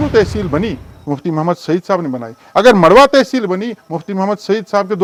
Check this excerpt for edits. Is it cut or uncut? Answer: uncut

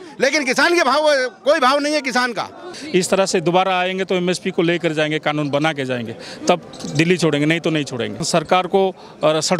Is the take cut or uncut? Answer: cut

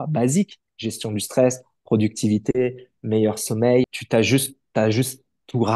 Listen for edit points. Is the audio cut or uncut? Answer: cut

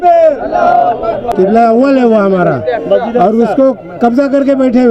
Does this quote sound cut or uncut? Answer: cut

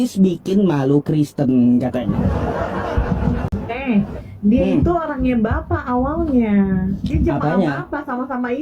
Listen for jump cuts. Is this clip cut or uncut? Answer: cut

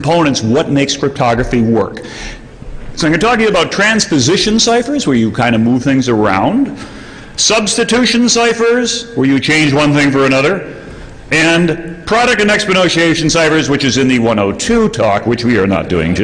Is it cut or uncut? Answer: cut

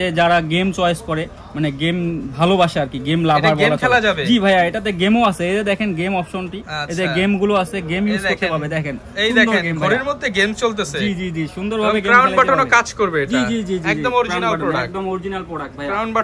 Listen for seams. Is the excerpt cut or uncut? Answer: uncut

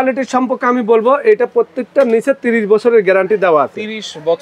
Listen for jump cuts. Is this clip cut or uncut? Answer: uncut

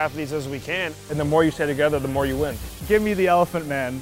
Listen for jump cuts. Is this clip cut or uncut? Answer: cut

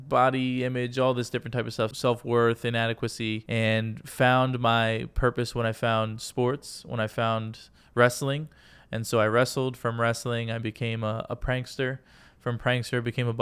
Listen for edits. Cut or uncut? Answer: cut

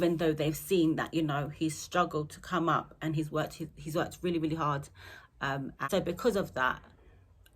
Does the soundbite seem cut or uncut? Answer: cut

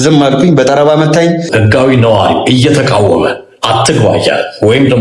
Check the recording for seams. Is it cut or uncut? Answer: cut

